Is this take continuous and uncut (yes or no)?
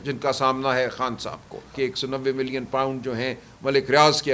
no